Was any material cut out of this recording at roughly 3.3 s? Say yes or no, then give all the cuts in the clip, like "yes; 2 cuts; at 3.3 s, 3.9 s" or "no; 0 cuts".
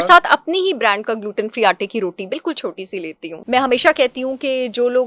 yes; 1 cut; at 3.3 s